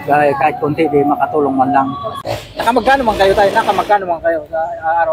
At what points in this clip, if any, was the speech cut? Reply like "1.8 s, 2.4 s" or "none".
2.1 s